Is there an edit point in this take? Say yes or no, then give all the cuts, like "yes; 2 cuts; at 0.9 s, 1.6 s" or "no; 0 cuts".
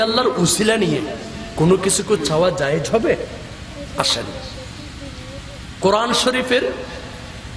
no; 0 cuts